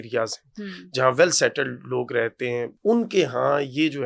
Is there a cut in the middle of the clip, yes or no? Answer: yes